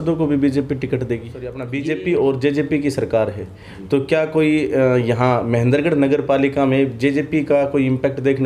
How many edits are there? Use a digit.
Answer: 1